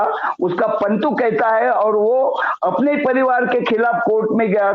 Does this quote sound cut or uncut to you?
uncut